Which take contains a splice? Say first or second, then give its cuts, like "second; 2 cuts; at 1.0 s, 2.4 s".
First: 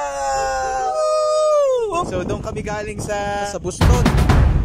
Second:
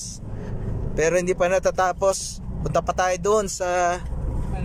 first; 3 cuts; at 0.9 s, 2.1 s, 3.5 s